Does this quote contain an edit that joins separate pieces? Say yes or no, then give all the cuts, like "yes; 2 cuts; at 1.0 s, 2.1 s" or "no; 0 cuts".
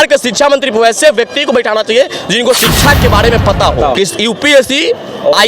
yes; 1 cut; at 3.9 s